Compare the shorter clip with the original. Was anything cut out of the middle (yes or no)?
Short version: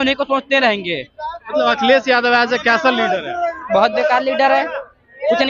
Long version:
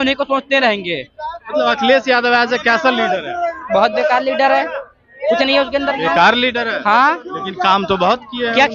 no